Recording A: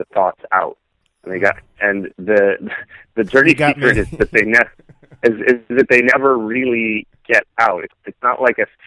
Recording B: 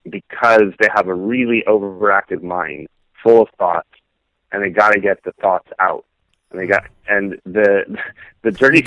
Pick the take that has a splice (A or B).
A